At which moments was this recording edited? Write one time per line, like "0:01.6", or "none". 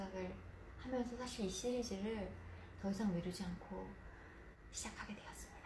0:04.5